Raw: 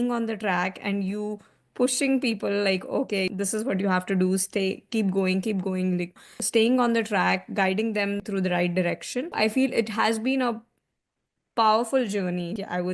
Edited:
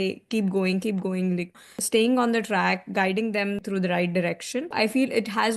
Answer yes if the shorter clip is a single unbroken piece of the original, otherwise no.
yes